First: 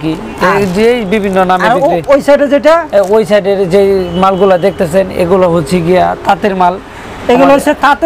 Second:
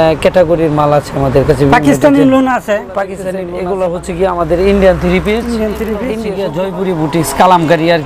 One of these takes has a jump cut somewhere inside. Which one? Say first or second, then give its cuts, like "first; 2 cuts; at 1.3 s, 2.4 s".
second; 2 cuts; at 3.2 s, 6.1 s